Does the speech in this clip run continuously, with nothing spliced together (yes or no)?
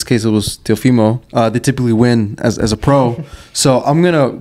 no